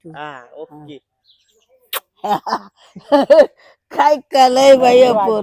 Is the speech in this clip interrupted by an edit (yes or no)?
no